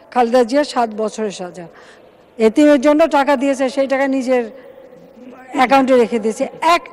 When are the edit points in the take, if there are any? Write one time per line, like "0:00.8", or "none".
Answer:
none